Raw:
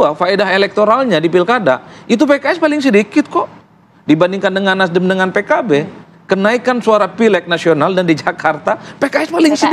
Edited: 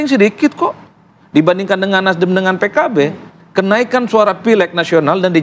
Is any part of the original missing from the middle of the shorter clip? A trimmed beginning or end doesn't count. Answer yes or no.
no